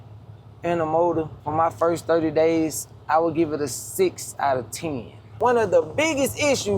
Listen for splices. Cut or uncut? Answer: cut